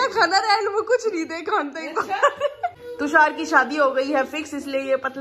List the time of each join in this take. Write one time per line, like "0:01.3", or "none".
0:02.8